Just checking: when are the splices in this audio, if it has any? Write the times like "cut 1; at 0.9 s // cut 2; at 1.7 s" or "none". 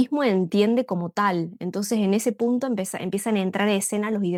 none